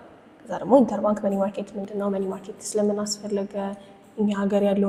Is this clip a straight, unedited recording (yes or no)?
yes